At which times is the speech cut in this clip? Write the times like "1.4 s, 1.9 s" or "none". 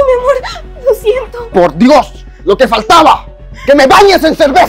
none